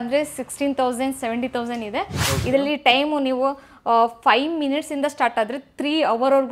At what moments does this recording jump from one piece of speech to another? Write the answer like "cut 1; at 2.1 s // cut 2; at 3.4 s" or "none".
cut 1; at 2.2 s